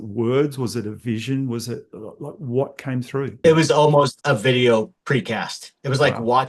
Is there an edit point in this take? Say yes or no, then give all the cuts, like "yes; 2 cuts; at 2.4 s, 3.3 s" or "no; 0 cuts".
yes; 3 cuts; at 3.4 s, 4.2 s, 5.0 s